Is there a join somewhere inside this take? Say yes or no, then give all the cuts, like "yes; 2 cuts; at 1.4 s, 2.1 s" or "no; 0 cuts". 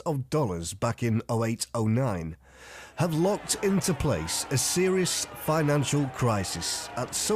no; 0 cuts